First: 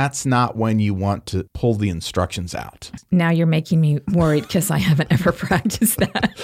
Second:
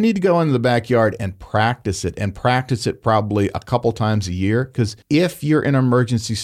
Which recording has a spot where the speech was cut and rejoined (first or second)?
second